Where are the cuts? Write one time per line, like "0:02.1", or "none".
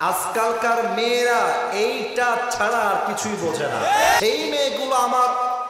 0:04.2